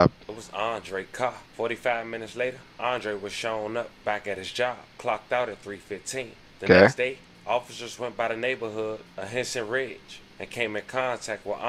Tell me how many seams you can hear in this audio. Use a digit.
0